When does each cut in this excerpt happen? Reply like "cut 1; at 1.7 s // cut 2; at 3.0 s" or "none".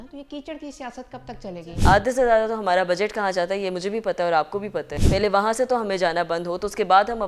cut 1; at 1.6 s // cut 2; at 5.0 s